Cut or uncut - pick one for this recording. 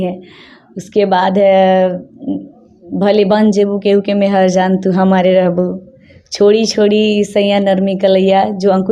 uncut